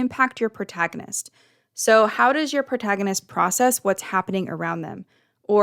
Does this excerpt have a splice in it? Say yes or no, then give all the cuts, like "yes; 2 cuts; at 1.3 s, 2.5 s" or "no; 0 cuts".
no; 0 cuts